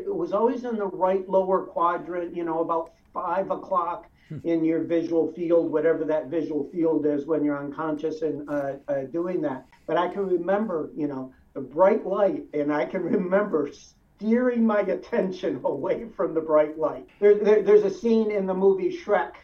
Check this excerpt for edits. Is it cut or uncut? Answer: cut